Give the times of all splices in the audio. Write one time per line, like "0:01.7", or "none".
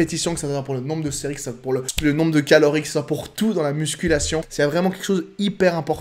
0:01.9
0:04.5

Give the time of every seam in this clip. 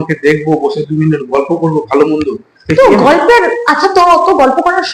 none

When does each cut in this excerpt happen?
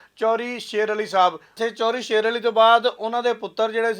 0:01.5

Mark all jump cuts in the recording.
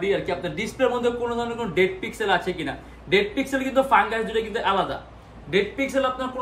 none

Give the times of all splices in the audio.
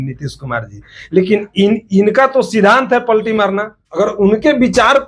0:03.8

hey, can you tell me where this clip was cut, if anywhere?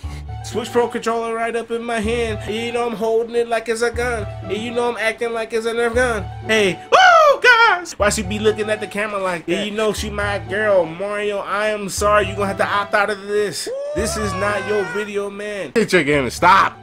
0:02.4
0:07.9
0:09.4
0:15.7

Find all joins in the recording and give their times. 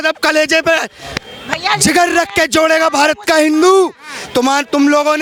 none

